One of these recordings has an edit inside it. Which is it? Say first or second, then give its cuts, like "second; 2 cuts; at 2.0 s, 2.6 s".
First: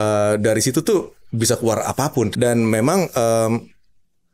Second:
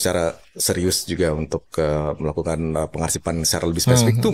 first; 1 cut; at 2.3 s